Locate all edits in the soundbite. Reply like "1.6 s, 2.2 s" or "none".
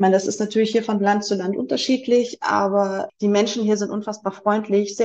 3.1 s